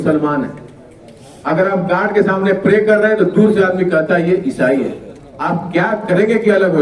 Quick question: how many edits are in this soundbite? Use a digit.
0